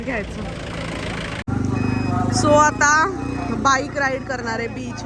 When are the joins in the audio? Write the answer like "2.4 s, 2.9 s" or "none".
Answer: 1.4 s